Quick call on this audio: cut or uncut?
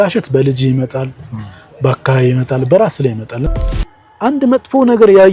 cut